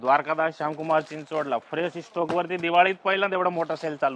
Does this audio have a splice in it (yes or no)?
no